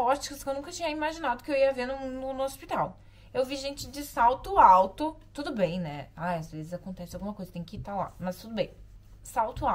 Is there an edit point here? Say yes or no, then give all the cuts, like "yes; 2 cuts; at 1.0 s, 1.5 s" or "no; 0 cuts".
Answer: no; 0 cuts